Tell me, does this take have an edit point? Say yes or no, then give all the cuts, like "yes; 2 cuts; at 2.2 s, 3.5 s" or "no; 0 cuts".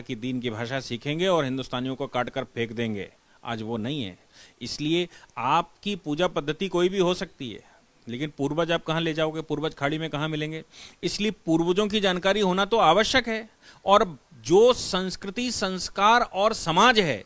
no; 0 cuts